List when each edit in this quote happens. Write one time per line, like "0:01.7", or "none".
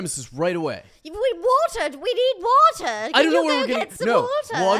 none